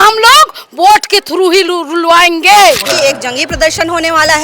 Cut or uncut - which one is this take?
cut